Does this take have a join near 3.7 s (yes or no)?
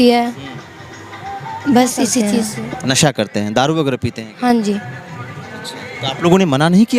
no